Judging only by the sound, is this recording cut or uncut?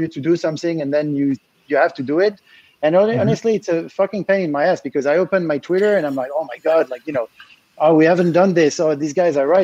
uncut